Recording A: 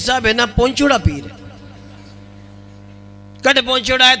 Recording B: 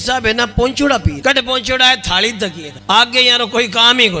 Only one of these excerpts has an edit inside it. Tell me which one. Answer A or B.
B